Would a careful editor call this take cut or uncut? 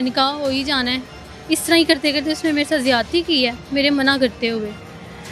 uncut